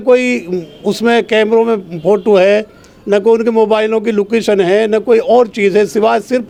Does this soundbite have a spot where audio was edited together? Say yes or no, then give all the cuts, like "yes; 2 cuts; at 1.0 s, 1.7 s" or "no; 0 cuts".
no; 0 cuts